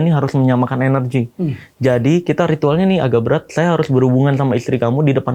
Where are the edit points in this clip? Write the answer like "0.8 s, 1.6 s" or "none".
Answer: none